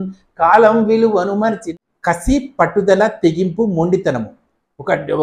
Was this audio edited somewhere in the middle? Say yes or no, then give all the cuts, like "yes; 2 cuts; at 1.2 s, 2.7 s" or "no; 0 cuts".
yes; 1 cut; at 1.7 s